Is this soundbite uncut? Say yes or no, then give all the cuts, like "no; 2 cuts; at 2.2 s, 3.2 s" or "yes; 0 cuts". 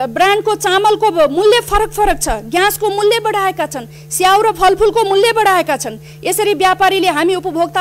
yes; 0 cuts